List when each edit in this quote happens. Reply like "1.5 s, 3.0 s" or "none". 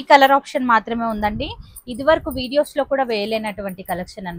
none